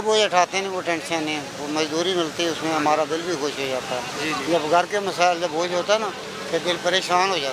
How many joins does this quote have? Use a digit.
0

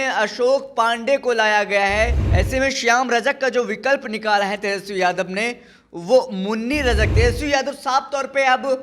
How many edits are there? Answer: 2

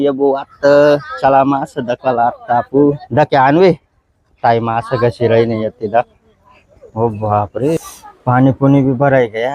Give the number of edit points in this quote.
2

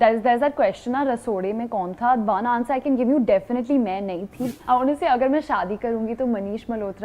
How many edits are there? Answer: 1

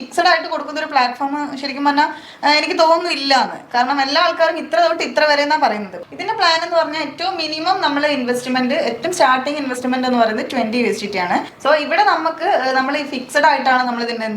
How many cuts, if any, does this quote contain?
2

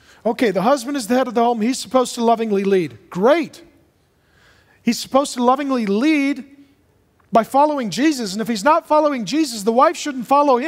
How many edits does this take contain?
1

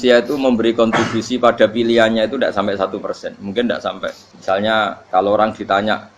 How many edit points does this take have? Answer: 2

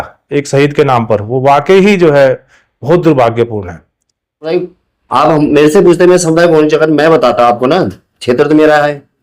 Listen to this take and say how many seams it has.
1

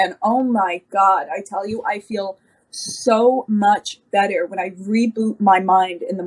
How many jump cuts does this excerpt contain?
0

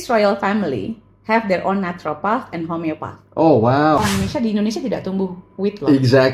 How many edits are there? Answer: 1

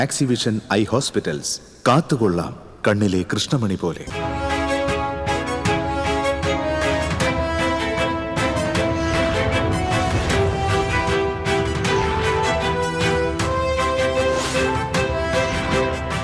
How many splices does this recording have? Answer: 1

